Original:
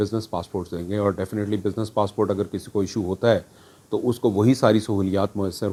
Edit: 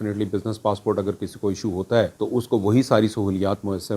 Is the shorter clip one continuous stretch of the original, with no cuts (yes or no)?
no